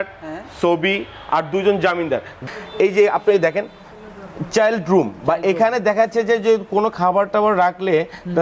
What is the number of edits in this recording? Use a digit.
1